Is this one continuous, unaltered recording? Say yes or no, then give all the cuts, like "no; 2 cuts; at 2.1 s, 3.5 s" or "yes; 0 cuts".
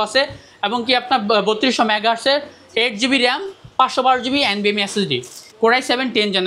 no; 1 cut; at 5.4 s